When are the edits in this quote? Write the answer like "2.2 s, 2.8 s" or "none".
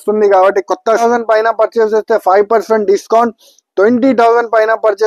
1.0 s

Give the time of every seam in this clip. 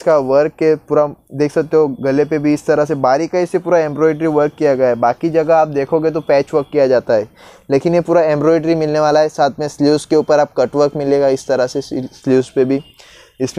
none

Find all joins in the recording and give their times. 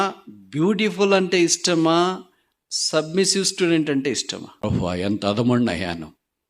4.5 s

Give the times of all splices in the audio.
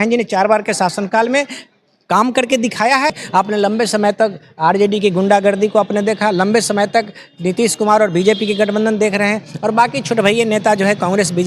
3.2 s

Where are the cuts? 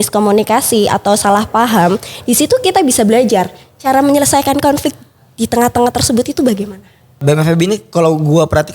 7.2 s

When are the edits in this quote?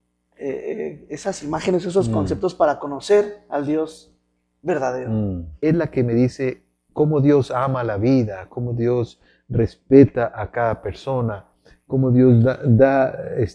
5.5 s

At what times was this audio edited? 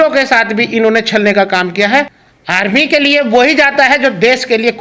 2.2 s

